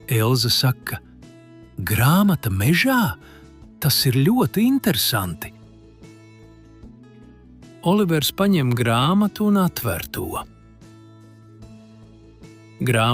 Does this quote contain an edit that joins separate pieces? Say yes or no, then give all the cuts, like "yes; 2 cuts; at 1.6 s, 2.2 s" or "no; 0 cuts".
no; 0 cuts